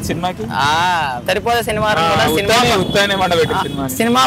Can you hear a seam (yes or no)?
yes